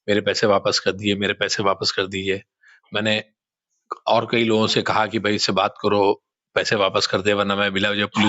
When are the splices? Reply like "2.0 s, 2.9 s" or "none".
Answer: none